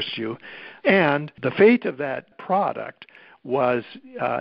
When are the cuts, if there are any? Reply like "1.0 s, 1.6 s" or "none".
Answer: 1.3 s, 2.4 s

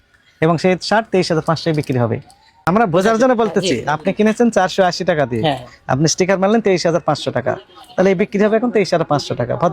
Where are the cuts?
2.6 s

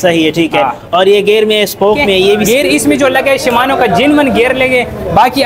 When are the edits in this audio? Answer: 2.4 s

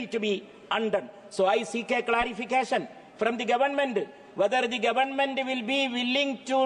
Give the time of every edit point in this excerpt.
none

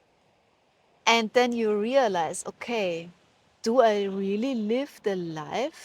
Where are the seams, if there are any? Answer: 1.0 s

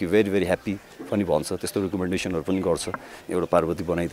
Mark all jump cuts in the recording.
3.2 s

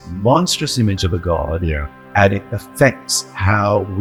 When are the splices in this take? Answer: none

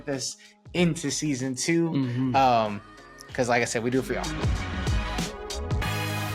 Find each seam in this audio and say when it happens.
4.3 s

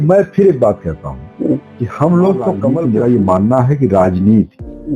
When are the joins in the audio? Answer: 2.7 s

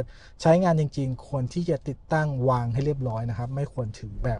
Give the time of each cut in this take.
none

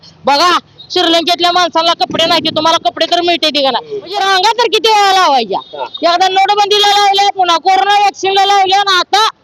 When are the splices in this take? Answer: 4.1 s

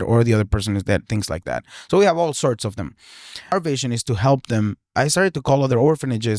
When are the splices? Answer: 3.5 s, 4.9 s

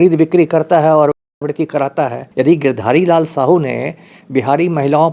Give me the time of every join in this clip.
2.2 s

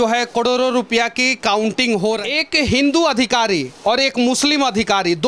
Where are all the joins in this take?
2.2 s

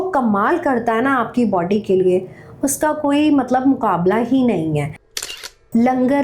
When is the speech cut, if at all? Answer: 5.1 s

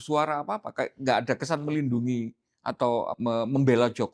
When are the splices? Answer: 3.2 s

